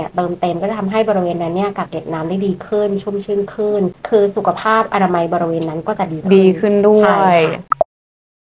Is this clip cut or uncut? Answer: uncut